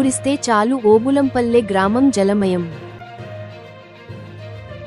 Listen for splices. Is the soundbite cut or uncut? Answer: uncut